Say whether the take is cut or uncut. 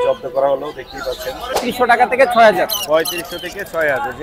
cut